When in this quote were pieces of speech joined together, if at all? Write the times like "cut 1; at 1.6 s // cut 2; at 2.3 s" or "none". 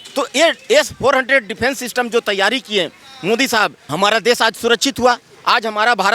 cut 1; at 3.8 s